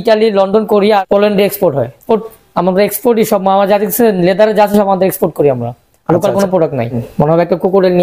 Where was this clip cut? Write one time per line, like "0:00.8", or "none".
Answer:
0:02.0
0:07.0